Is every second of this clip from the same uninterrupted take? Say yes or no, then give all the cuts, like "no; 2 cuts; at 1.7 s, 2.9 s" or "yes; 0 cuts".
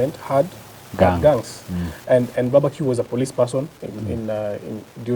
yes; 0 cuts